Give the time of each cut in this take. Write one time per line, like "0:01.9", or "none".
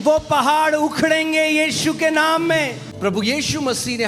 0:02.8